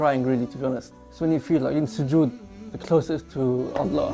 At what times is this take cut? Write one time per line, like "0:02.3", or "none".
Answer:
0:01.0